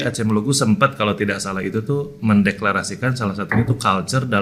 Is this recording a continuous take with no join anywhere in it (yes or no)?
yes